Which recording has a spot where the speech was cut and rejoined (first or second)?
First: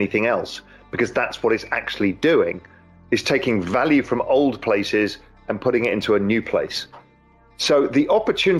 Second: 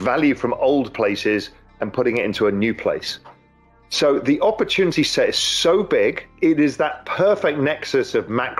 second